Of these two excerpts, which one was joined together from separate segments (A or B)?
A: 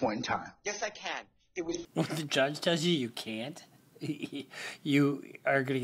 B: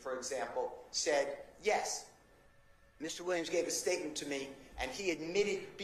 A